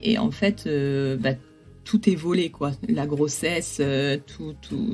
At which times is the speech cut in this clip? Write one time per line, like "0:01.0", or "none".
0:01.8